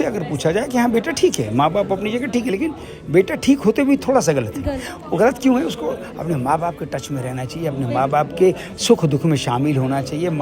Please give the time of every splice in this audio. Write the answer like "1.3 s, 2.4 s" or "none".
none